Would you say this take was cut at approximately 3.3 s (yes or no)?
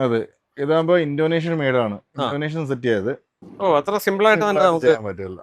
yes